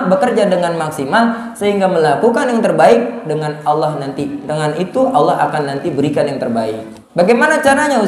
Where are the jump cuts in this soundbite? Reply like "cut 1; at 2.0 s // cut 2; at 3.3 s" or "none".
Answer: cut 1; at 6.9 s